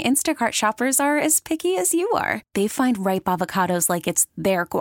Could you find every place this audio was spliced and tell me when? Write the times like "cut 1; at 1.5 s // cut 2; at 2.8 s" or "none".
none